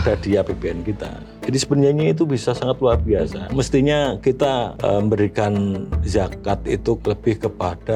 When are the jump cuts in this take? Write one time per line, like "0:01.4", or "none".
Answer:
0:03.4
0:04.7
0:05.9
0:07.0